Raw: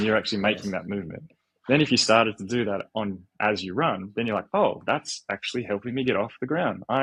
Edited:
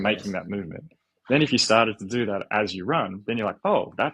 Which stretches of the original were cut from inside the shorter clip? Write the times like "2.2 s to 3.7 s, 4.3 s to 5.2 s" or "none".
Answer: 2.8 s to 3.3 s